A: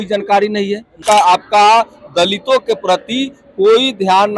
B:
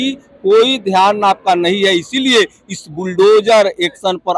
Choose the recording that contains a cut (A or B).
A